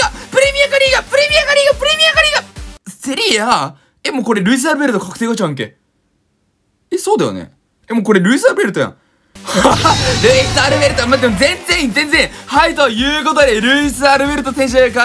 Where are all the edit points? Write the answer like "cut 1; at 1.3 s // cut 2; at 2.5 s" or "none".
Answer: none